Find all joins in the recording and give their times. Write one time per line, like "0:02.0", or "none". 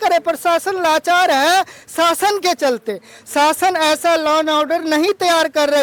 none